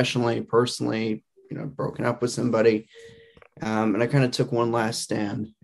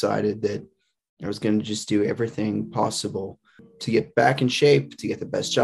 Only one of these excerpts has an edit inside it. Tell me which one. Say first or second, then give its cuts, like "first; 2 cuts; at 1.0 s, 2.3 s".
second; 1 cut; at 3.7 s